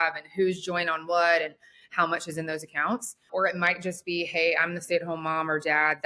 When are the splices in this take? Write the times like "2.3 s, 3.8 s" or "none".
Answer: 3.3 s